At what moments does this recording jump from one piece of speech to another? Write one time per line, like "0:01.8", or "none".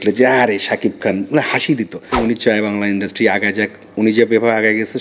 0:02.2